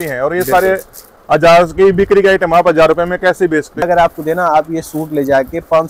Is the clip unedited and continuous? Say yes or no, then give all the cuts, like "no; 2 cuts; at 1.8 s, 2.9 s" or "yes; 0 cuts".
no; 1 cut; at 3.9 s